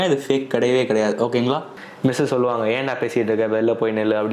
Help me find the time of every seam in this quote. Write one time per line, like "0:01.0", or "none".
0:01.7